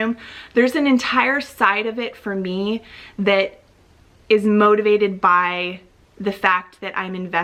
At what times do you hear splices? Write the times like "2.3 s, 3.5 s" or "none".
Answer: none